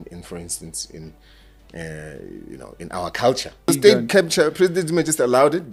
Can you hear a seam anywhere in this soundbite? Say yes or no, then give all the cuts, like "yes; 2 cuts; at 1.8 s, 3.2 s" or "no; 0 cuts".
yes; 1 cut; at 3.7 s